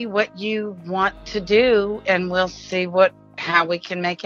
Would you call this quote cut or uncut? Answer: cut